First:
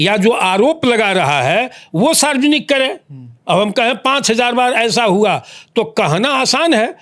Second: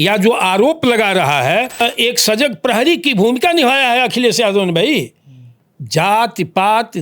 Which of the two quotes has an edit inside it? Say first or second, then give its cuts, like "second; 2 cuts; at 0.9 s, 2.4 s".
second; 1 cut; at 1.8 s